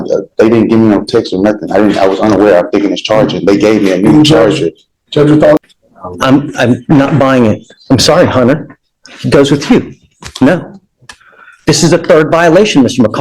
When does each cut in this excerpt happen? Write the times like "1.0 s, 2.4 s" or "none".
5.6 s